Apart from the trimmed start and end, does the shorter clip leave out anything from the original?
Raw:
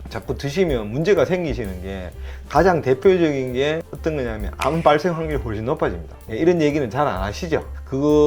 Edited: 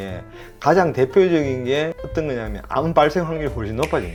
no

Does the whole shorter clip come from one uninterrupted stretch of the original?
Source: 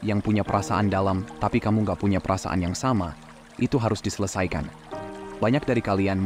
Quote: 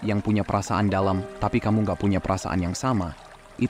yes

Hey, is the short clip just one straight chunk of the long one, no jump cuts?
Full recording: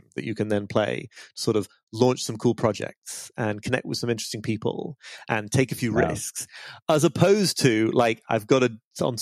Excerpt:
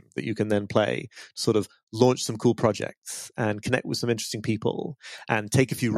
yes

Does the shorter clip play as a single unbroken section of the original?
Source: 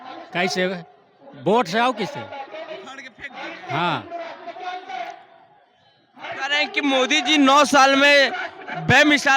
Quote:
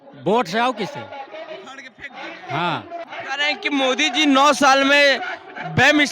no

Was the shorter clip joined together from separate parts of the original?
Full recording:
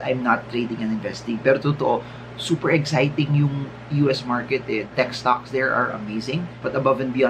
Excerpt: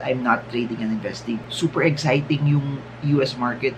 yes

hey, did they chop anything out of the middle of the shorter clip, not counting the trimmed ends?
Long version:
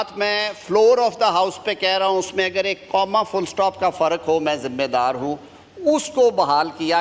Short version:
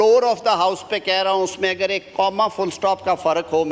no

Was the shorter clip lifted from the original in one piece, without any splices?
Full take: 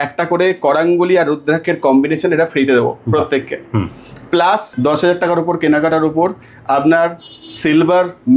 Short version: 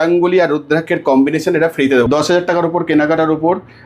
no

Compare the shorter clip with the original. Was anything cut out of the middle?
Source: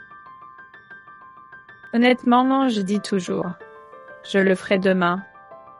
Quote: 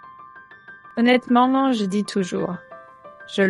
yes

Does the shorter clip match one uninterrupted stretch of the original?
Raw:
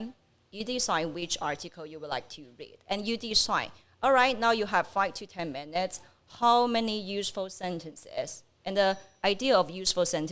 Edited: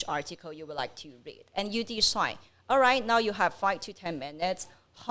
yes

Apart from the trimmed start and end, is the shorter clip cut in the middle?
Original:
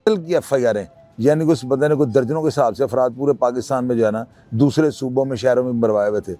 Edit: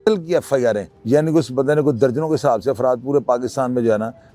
yes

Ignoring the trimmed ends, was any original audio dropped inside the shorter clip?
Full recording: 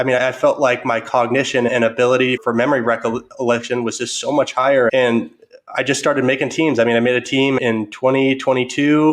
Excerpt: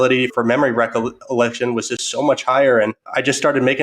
yes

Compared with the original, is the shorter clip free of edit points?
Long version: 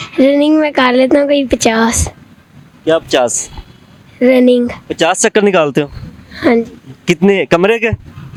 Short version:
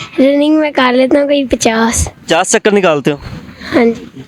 no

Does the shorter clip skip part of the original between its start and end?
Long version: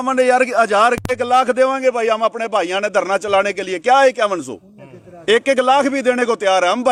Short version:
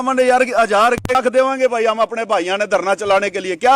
yes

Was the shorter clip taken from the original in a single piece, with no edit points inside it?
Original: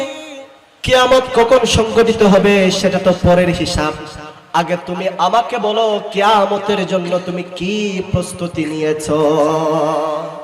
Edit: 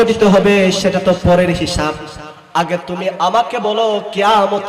yes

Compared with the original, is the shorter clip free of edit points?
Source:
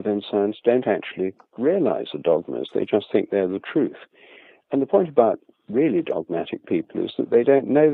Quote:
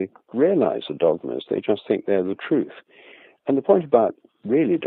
yes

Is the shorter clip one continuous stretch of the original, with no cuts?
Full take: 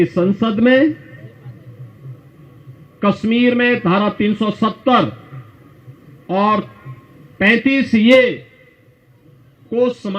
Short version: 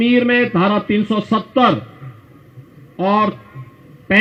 yes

